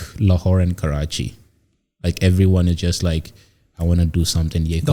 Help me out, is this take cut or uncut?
uncut